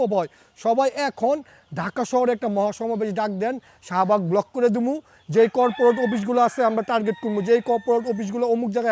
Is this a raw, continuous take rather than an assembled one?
yes; 0 cuts

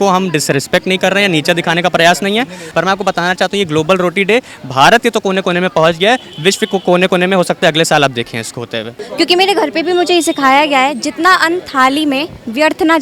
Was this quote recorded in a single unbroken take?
no; 2 cuts; at 2.6 s, 9.0 s

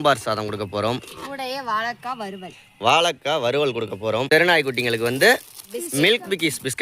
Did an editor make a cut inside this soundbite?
yes; 1 cut; at 4.3 s

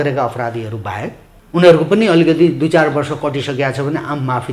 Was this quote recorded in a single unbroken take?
no; 1 cut; at 1.3 s

